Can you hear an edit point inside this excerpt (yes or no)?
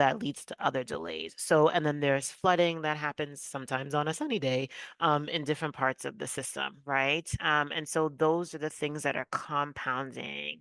no